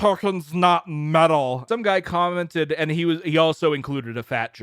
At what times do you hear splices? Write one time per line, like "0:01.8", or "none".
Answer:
0:01.6